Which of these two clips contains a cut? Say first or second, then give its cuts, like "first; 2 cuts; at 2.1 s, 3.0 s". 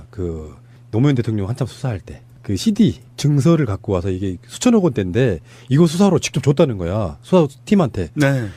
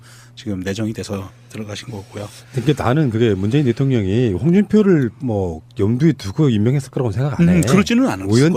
first; 1 cut; at 2.7 s